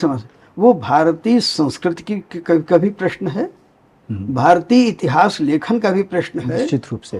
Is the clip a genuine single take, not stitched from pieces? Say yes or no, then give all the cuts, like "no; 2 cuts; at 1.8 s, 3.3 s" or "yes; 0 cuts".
yes; 0 cuts